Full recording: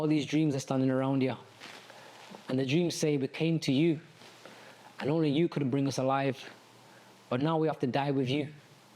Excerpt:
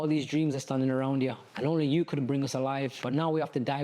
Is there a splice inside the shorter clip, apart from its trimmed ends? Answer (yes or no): yes